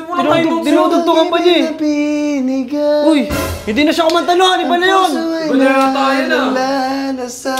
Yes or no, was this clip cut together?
no